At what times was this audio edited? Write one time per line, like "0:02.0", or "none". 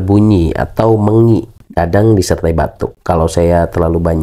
none